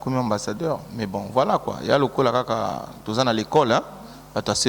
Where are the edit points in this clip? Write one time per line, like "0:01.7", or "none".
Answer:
none